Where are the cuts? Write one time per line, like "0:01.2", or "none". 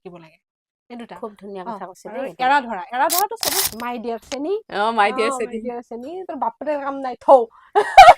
0:03.7